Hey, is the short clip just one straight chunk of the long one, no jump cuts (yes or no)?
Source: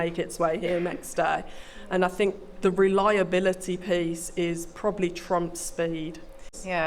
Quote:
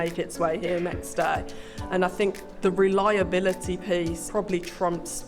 no